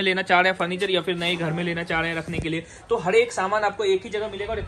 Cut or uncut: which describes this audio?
uncut